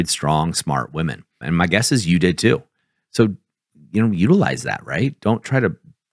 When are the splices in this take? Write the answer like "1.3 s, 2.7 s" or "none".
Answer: 1.3 s